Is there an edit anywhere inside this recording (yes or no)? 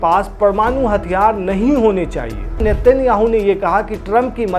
yes